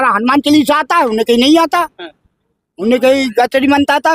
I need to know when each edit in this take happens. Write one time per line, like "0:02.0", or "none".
none